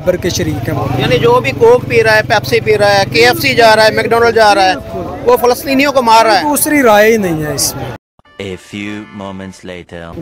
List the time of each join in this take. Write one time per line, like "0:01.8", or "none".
none